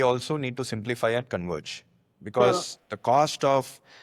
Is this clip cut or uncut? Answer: uncut